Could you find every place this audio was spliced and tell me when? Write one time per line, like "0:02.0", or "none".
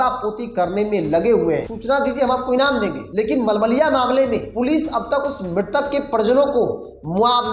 0:01.7
0:03.0
0:04.5

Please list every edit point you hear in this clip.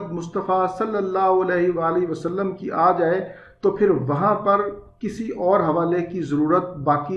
none

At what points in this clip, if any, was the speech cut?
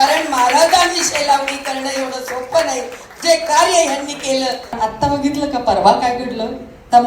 0:04.8

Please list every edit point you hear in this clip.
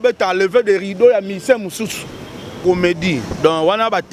0:02.6

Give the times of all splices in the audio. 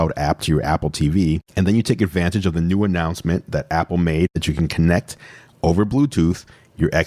0:04.4

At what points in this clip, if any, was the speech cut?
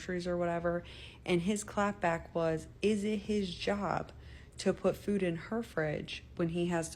0:00.9

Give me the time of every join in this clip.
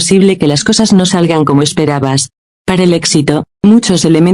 0:01.1

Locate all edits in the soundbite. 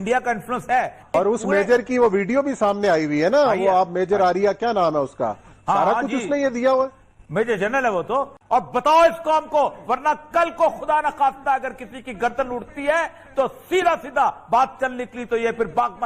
0:01.0
0:08.4

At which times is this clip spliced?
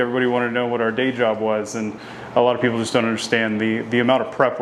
none

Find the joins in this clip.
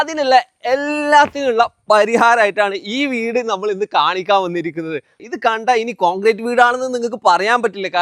0:05.2

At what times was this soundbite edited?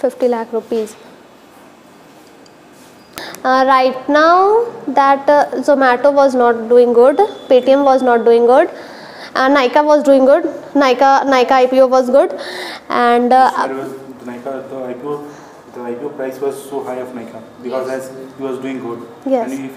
0:03.3

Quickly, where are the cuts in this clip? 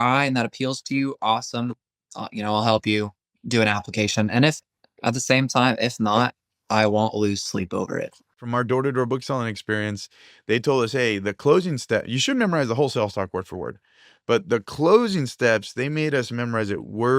0:08.4

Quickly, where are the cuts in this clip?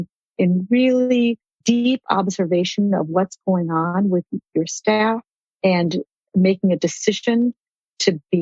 0:01.6

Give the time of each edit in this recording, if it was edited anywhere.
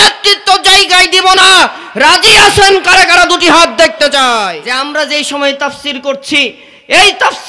0:04.6

